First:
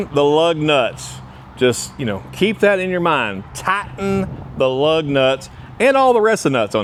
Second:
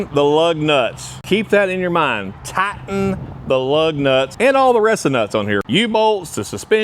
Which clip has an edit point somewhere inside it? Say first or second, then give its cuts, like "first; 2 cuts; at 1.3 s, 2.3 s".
second; 3 cuts; at 1.1 s, 4.3 s, 5.6 s